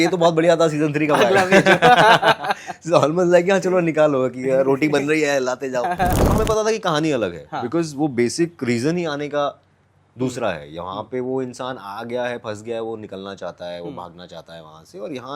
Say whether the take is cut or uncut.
cut